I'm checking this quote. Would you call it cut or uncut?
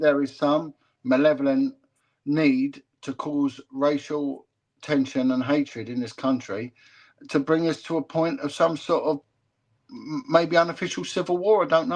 uncut